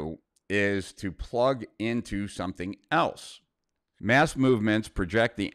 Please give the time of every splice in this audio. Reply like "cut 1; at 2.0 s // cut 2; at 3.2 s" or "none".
cut 1; at 3.9 s